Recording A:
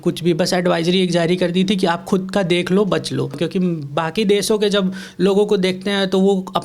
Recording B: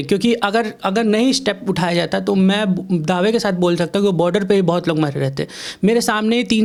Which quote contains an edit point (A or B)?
A